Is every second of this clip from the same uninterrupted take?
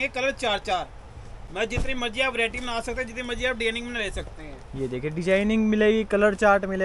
yes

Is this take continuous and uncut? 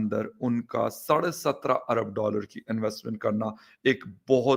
yes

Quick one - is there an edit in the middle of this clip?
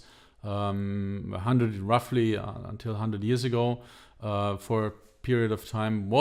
no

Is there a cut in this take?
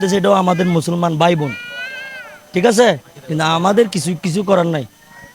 no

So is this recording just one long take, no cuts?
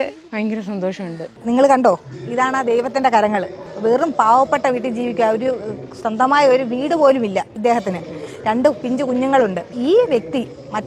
yes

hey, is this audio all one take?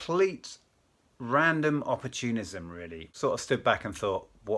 no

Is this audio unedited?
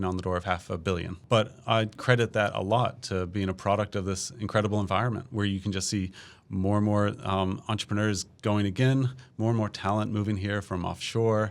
no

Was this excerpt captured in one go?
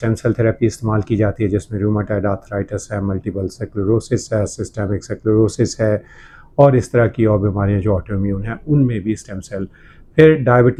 yes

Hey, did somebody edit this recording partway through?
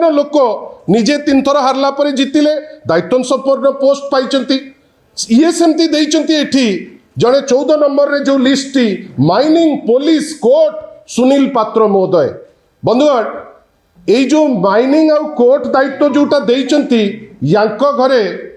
no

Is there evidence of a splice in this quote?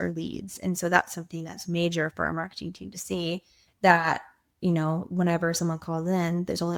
no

